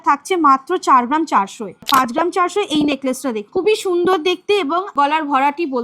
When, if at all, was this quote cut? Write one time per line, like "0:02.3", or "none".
0:01.8
0:03.4
0:04.9